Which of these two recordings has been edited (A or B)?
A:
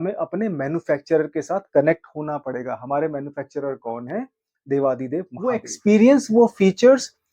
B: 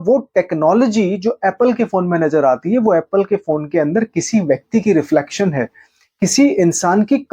A